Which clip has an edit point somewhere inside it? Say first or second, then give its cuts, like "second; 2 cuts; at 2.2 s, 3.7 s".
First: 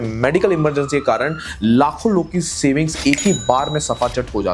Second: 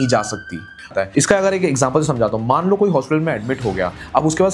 second; 1 cut; at 0.9 s